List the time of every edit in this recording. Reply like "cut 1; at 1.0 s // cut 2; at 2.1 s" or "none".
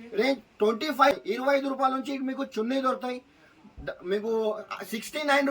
cut 1; at 1.1 s